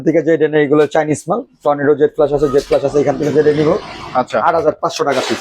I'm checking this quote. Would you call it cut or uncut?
uncut